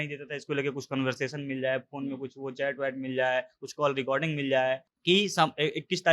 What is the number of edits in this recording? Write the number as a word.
one